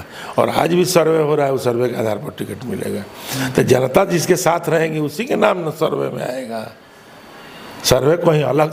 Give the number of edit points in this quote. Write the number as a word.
zero